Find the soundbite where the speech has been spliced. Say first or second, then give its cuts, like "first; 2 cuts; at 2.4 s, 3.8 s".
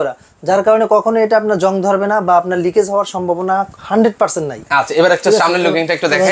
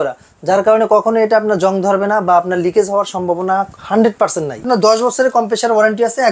second; 1 cut; at 4.6 s